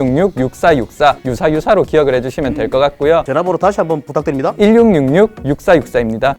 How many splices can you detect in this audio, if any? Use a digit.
2